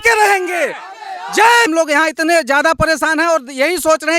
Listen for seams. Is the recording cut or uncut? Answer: cut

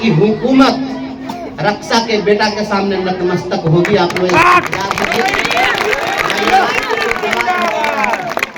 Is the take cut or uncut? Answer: uncut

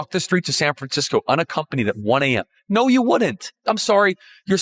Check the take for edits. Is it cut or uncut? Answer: uncut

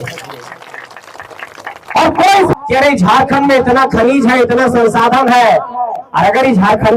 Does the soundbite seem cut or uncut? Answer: cut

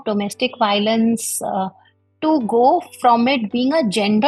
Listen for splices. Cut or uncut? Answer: uncut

